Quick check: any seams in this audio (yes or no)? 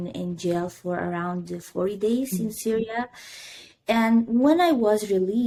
no